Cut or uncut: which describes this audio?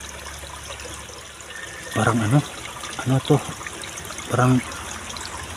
cut